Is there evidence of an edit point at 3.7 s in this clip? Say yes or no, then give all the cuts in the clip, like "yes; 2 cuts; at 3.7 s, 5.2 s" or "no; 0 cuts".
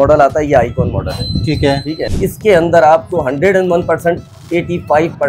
no; 1 cut; at 2.1 s